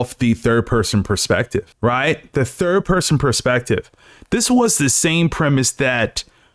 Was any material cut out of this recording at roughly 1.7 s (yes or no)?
yes